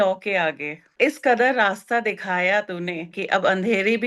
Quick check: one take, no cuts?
no; 2 cuts; at 0.9 s, 3.1 s

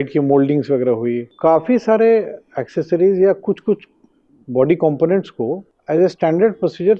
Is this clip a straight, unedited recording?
no; 2 cuts; at 1.3 s, 5.7 s

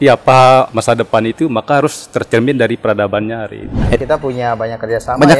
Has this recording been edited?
yes; 1 cut; at 3.8 s

